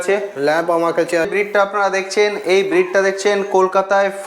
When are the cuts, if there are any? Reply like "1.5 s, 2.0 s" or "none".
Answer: 1.3 s